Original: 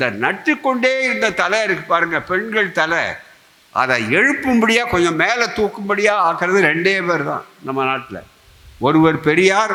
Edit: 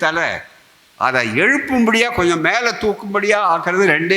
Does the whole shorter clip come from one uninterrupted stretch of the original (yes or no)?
yes